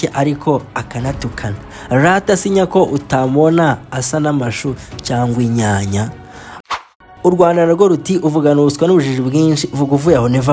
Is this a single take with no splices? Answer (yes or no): no